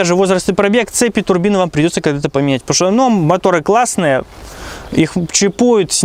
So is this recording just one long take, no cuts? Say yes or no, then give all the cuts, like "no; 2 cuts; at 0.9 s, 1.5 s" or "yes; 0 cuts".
yes; 0 cuts